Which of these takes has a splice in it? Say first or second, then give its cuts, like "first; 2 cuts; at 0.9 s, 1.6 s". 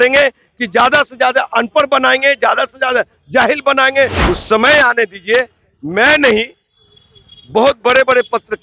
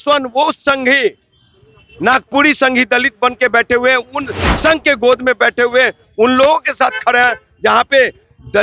first; 1 cut; at 4.2 s